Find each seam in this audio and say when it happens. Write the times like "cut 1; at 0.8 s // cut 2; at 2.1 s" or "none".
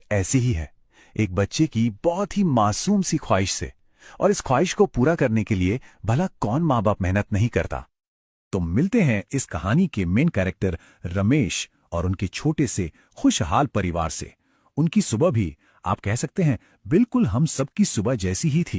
cut 1; at 10.1 s